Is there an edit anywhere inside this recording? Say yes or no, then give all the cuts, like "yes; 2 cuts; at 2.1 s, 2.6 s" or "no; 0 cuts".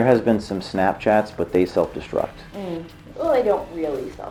no; 0 cuts